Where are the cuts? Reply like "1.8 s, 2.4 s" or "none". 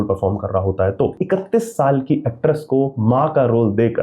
1.2 s